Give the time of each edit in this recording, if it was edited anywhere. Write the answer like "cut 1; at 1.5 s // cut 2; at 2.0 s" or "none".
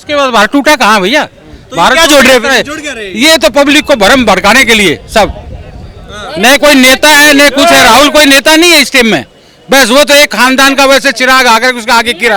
none